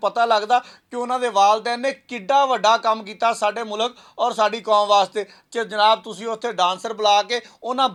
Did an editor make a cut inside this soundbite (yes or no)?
no